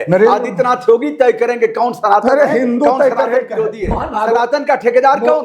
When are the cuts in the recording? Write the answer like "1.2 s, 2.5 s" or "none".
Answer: 3.9 s